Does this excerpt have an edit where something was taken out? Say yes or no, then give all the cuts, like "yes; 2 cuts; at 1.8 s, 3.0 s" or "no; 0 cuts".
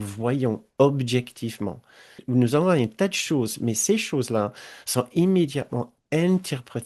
yes; 1 cut; at 2.2 s